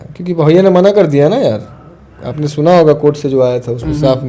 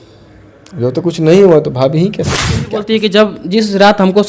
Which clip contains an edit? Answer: second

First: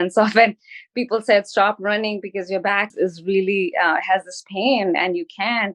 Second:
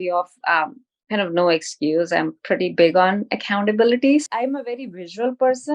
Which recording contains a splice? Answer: second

